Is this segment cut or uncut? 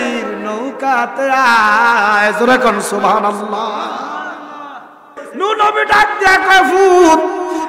cut